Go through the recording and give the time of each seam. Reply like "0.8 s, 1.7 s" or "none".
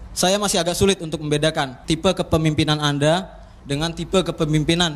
1.8 s